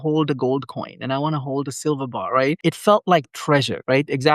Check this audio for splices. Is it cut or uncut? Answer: cut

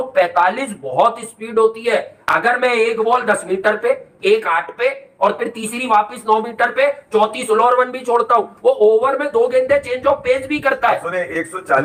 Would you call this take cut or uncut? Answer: uncut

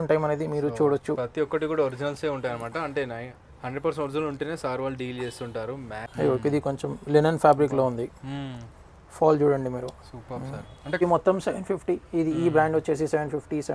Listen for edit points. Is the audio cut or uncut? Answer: cut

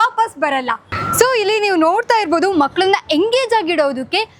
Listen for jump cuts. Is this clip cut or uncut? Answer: cut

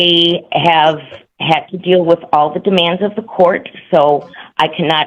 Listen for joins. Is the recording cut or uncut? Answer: uncut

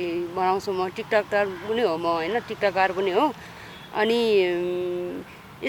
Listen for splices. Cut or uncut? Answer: uncut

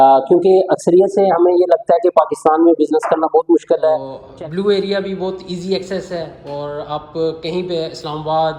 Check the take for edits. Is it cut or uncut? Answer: cut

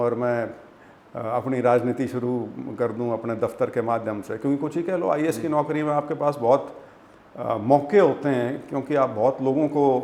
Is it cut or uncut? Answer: uncut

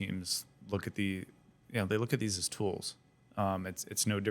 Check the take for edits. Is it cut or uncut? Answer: uncut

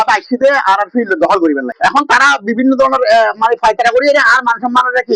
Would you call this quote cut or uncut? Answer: cut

